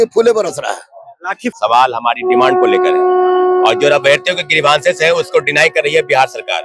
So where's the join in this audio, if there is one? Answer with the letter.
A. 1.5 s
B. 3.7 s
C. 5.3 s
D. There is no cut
A